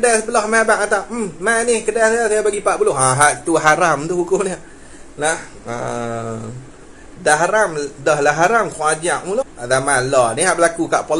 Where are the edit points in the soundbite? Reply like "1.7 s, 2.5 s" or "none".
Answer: 9.5 s